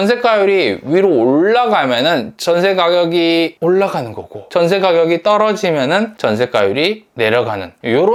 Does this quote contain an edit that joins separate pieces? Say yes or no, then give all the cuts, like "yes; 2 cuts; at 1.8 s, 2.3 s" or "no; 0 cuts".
no; 0 cuts